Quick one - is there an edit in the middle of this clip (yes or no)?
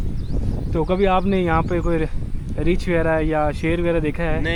no